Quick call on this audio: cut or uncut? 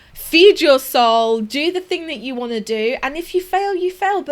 uncut